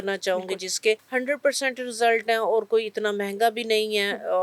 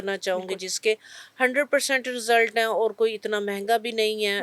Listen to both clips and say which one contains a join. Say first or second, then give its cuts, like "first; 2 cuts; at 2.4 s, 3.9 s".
first; 1 cut; at 1.0 s